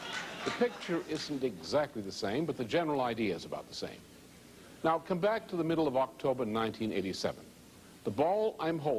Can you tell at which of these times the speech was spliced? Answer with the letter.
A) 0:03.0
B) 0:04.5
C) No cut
C